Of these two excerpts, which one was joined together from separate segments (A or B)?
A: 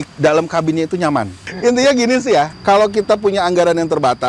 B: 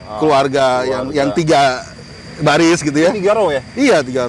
A